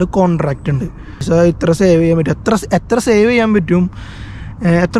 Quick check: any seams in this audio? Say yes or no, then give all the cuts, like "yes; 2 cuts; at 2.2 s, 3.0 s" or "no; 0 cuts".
yes; 1 cut; at 1.2 s